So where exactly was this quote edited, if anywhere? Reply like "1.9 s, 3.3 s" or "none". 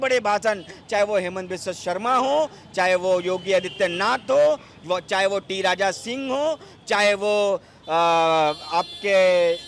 none